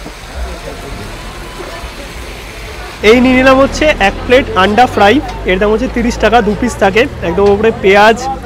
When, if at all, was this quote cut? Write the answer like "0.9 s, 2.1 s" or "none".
3.0 s